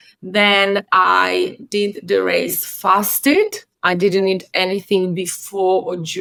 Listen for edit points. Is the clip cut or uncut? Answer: uncut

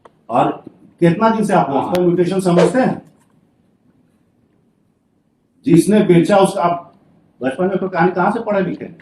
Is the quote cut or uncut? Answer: cut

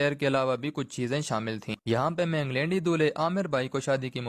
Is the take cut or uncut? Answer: cut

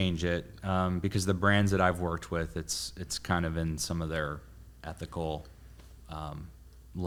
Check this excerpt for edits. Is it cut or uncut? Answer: uncut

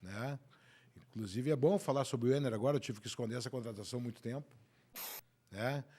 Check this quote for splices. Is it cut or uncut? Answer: cut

